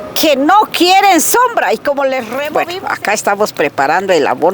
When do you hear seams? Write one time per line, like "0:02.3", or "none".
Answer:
0:02.4